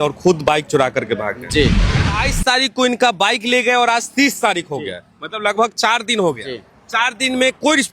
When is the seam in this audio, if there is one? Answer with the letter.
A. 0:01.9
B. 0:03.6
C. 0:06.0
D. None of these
A